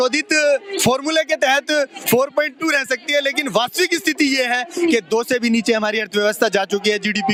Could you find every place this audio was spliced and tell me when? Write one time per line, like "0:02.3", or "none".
none